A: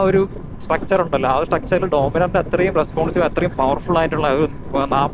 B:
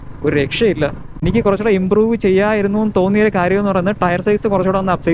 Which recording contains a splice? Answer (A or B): B